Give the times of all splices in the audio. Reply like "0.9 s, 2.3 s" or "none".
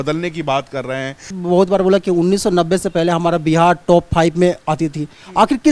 1.4 s